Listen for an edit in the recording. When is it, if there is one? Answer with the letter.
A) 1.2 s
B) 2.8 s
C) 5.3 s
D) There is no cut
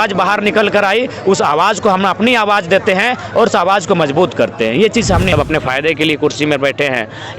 C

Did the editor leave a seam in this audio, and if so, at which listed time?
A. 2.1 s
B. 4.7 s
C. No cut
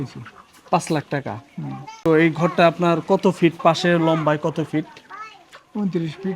A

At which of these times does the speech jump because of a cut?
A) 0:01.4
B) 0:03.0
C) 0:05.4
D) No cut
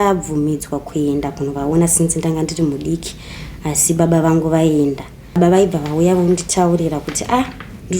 C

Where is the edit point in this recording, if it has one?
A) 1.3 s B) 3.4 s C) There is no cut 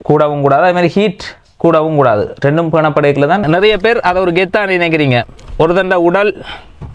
B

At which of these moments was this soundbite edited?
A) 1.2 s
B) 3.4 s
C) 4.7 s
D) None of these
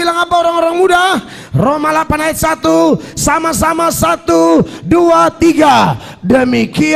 D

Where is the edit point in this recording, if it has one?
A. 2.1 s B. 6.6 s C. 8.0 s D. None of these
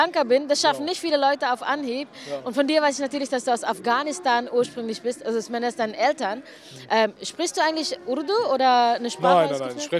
B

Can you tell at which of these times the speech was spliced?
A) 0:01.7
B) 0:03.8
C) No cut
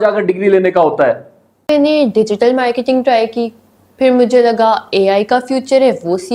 A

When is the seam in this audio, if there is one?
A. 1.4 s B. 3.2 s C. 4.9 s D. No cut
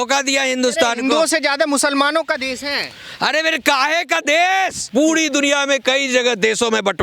C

